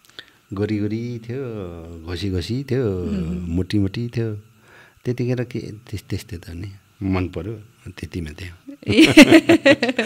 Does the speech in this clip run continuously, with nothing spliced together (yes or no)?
yes